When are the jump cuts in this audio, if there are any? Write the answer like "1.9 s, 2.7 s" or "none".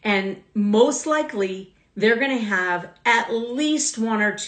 none